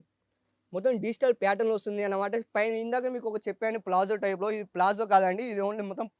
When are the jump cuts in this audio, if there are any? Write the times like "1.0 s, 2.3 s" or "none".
none